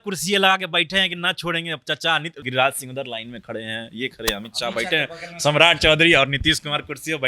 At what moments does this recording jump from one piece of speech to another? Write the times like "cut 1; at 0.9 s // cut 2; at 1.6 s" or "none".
cut 1; at 2.4 s